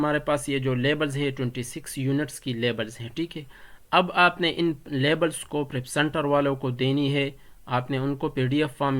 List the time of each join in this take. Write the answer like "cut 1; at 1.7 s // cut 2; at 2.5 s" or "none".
none